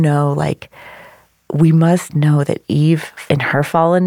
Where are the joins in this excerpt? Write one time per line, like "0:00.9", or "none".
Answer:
0:03.2